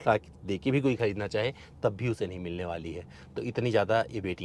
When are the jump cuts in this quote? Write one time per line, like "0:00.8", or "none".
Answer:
none